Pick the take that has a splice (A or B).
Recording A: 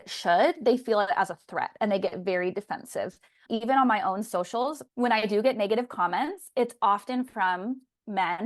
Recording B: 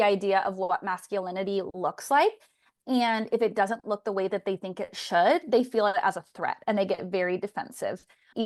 A